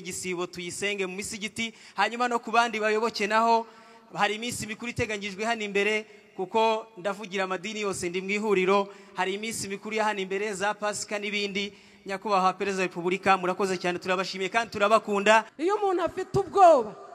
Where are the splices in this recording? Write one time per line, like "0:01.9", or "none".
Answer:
0:15.5